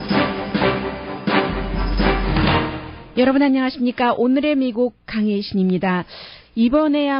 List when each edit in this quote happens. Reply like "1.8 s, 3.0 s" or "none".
0.9 s